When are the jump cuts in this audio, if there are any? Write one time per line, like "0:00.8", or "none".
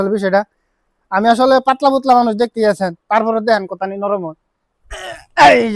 none